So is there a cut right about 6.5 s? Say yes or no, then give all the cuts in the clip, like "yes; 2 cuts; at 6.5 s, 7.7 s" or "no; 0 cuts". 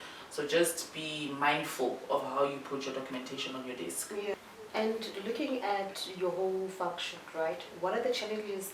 no; 1 cut; at 4.3 s